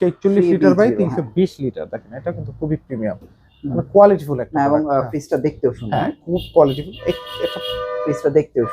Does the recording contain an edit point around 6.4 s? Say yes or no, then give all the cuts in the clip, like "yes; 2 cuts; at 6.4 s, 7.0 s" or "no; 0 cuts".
no; 0 cuts